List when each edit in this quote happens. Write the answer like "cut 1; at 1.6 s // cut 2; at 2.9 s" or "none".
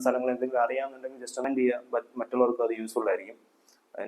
cut 1; at 1.4 s